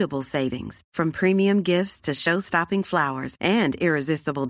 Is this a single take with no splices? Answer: yes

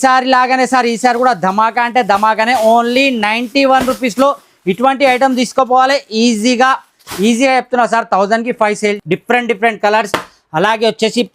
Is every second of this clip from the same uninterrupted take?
no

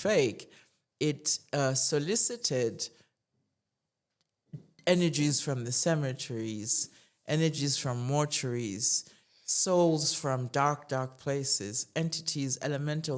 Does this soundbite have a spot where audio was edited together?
no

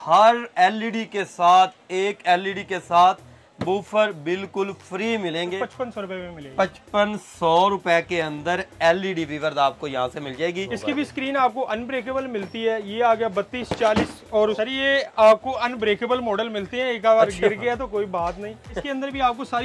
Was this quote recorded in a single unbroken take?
no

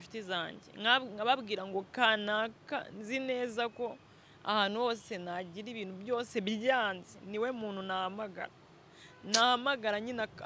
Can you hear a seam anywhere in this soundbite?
no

